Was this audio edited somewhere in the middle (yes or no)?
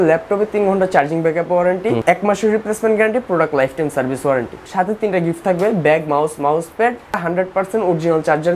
yes